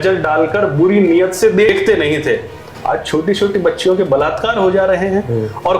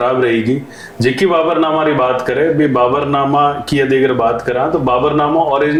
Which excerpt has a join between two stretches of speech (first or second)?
first